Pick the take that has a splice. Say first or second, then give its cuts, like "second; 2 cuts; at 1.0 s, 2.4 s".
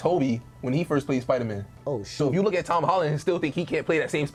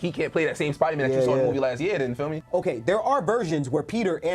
second; 1 cut; at 2.4 s